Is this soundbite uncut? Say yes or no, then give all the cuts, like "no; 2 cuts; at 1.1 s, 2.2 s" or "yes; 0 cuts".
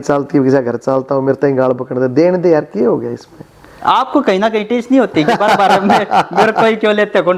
yes; 0 cuts